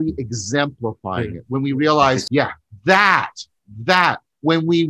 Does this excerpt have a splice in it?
yes; 1 cut; at 2.2 s

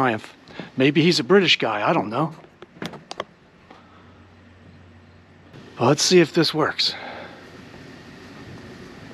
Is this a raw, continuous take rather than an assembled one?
no; 1 cut; at 5.6 s

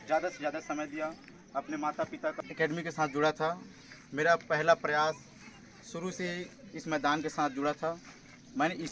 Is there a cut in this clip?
yes; 1 cut; at 2.4 s

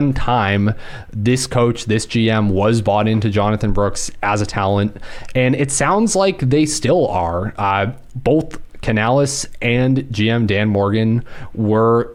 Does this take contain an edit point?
no; 0 cuts

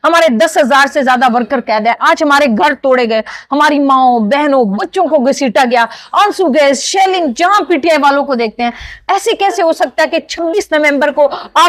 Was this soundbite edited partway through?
no; 0 cuts

